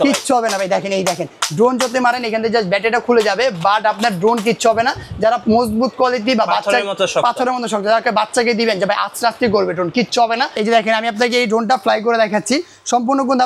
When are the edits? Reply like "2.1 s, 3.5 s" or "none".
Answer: 10.6 s

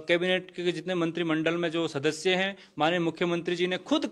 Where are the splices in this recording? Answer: none

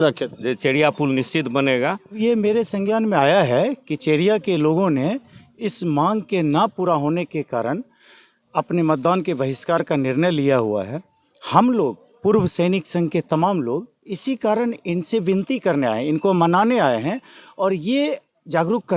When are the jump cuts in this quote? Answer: 2.2 s

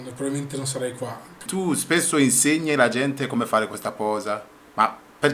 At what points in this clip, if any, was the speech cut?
1.5 s

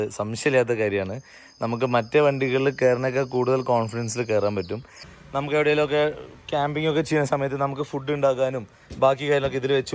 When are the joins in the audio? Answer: 5.0 s

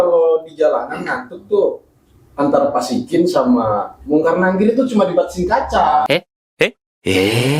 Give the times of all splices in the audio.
none

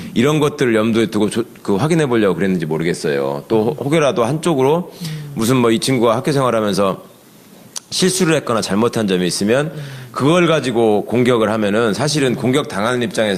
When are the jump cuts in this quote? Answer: 9.7 s

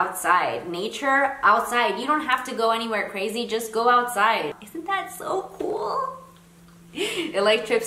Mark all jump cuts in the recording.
4.6 s

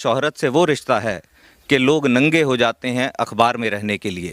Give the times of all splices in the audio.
none

